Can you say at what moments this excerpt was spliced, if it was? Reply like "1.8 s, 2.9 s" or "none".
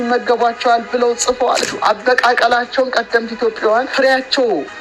1.7 s, 3.9 s